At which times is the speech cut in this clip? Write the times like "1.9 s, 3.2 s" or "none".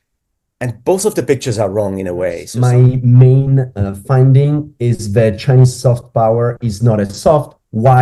2.5 s